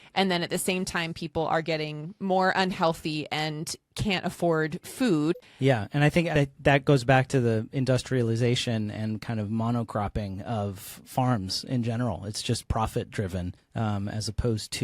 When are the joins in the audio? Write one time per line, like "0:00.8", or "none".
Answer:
0:05.4
0:06.3
0:13.6